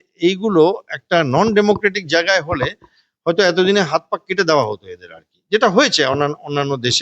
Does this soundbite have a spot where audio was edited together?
no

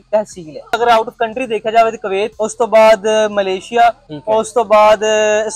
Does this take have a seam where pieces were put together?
yes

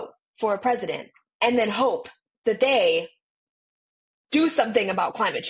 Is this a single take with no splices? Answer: yes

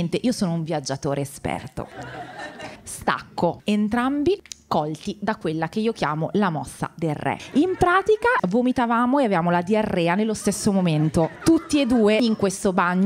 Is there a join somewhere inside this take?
yes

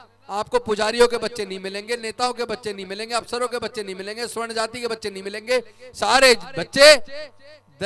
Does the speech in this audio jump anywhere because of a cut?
no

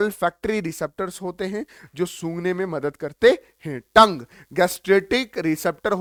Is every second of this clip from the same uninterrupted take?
yes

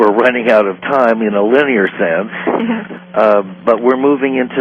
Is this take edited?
yes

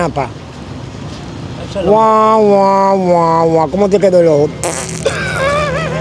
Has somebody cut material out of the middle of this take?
no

